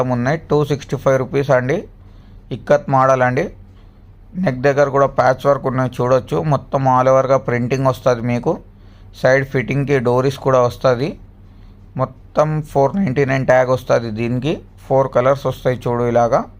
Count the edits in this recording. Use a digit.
0